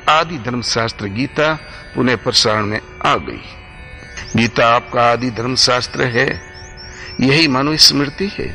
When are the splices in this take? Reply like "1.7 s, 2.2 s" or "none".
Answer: none